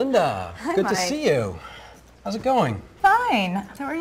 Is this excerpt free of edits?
no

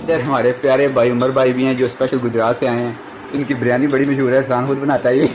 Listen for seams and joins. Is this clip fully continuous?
yes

